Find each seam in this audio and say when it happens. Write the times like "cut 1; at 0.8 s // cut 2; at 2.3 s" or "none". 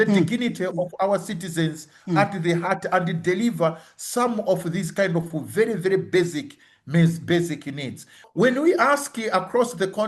cut 1; at 8.2 s